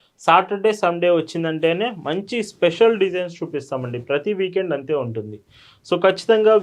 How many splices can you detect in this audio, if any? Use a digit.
0